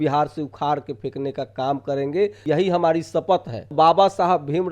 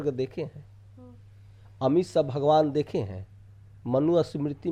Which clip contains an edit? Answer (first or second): first